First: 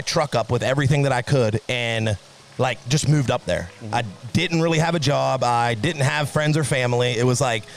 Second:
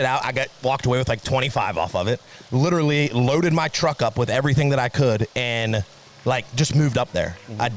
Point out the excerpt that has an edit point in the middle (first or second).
second